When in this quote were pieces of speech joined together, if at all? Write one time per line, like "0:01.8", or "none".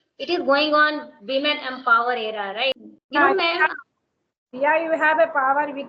0:02.9